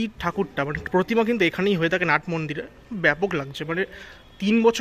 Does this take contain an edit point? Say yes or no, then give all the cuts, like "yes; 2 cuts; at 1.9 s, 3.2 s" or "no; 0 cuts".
no; 0 cuts